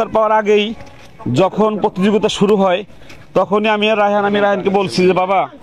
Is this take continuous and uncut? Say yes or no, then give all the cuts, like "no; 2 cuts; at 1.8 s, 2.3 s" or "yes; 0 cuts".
yes; 0 cuts